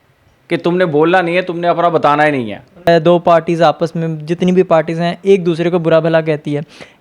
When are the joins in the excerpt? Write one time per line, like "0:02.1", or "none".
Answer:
0:02.9